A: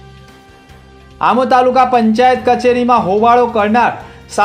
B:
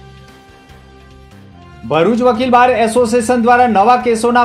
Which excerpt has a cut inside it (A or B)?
A